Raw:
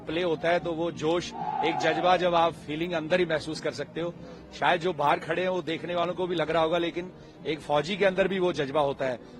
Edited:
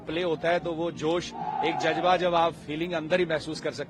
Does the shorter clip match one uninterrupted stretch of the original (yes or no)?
yes